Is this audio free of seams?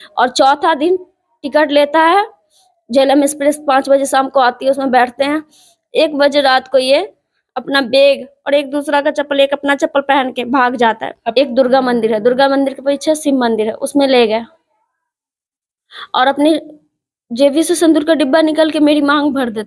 no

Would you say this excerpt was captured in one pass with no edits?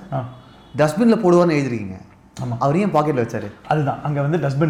yes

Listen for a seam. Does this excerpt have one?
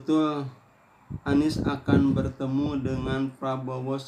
no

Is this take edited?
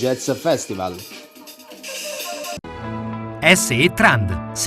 no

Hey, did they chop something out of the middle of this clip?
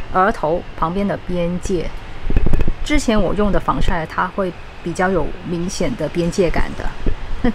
no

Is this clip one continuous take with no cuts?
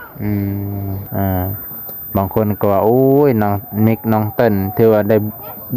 no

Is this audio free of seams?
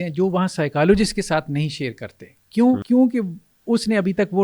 no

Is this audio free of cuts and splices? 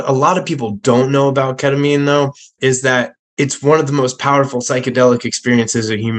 no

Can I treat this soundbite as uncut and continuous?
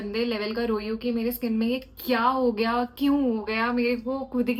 yes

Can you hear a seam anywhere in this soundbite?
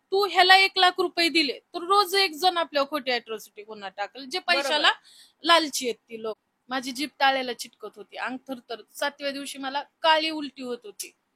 yes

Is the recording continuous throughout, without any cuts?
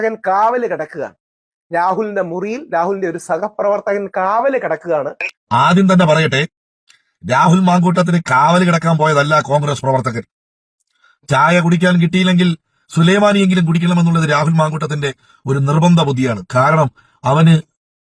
yes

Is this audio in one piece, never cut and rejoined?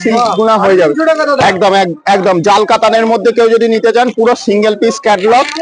yes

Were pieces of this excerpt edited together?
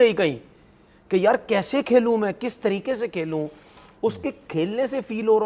no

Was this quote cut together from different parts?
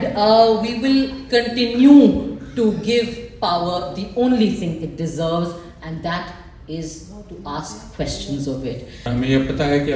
yes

